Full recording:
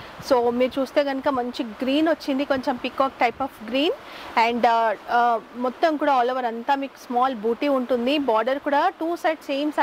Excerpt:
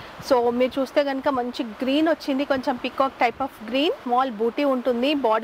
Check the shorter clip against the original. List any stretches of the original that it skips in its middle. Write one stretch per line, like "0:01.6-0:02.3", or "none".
0:04.0-0:07.0